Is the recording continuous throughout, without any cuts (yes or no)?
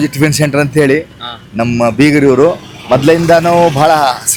yes